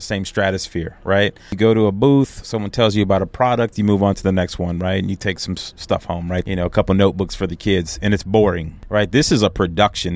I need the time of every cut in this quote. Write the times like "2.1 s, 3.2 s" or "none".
1.5 s, 6.4 s, 8.7 s

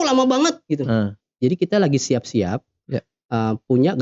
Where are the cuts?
1.2 s

